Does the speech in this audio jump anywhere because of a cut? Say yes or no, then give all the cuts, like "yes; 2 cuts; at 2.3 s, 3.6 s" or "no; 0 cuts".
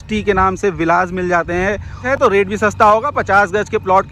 yes; 1 cut; at 2.0 s